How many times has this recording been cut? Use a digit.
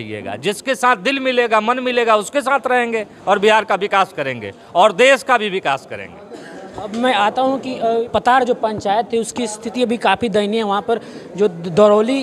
0